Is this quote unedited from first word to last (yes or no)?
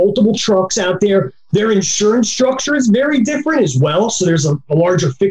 yes